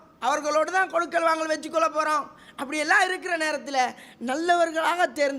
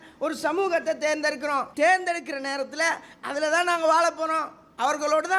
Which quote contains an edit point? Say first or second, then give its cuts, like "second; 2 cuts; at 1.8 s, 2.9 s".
second; 1 cut; at 1.7 s